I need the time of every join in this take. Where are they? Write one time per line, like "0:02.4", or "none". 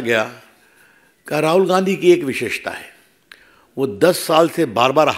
none